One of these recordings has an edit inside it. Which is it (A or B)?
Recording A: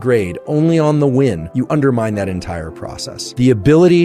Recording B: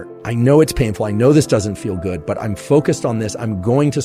A